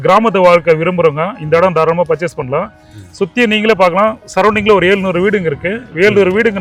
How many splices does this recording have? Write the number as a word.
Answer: zero